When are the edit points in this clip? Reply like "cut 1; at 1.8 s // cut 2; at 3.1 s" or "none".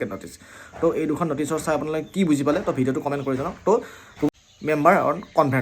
cut 1; at 4.3 s